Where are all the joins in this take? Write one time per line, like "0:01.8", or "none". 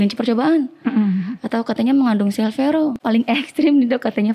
0:03.0